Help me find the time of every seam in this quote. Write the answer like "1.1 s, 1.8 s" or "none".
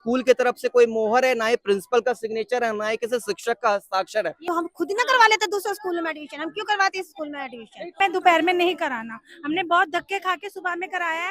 4.5 s, 8.0 s